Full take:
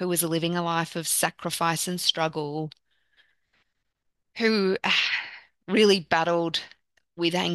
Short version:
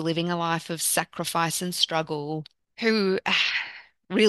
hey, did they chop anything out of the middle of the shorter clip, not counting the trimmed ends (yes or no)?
yes